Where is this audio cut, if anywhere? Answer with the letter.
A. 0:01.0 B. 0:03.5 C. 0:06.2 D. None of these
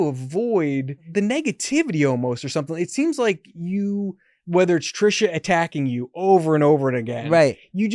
A